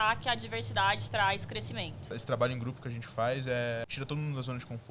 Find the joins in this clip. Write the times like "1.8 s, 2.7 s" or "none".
2.2 s, 3.9 s